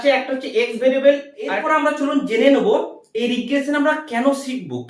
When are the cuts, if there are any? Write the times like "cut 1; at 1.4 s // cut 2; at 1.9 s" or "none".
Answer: cut 1; at 1.6 s